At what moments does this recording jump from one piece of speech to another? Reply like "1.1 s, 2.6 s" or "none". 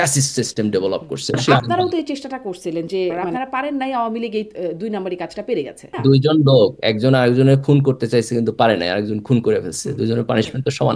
1.4 s, 3.2 s, 5.9 s